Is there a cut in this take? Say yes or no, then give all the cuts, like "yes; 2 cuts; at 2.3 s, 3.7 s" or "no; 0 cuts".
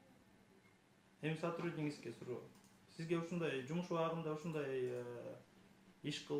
no; 0 cuts